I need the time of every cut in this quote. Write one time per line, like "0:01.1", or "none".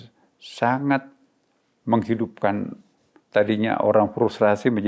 none